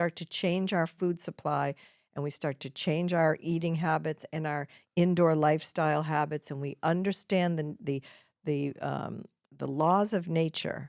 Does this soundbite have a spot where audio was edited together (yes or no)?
no